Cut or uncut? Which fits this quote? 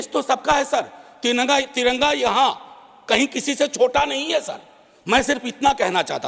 uncut